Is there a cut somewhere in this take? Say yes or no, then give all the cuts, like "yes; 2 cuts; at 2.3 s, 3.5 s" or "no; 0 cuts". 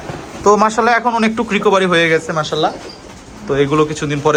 no; 0 cuts